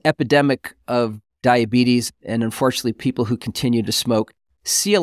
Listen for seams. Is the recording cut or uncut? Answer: cut